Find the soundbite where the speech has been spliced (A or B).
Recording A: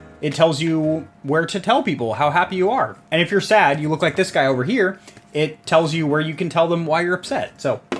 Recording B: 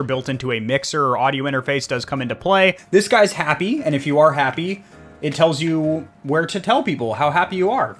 B